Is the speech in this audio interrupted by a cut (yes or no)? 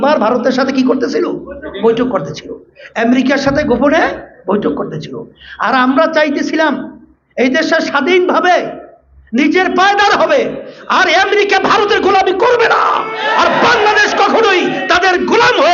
no